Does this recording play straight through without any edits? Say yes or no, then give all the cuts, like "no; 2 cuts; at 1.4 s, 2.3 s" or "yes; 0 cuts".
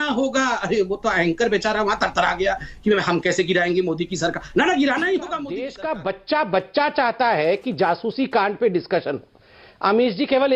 no; 1 cut; at 5.7 s